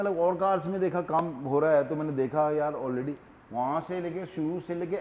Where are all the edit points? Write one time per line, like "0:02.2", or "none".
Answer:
none